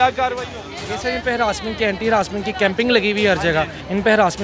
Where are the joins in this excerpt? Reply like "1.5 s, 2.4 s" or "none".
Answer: none